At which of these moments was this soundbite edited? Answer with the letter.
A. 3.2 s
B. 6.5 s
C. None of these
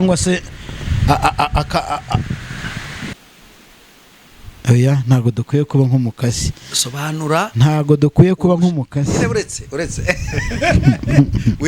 A